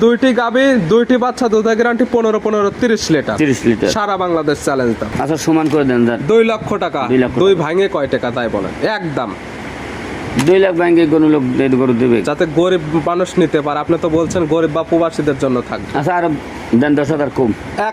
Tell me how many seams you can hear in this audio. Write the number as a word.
one